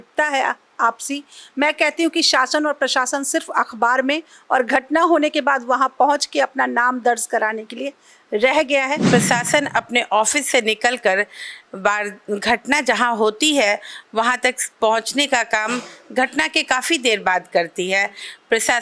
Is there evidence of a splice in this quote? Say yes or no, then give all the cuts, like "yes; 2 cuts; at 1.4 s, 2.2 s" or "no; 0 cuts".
yes; 1 cut; at 9.0 s